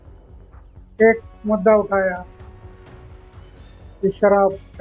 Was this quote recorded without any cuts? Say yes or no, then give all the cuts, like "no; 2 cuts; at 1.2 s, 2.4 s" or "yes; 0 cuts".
no; 1 cut; at 1.0 s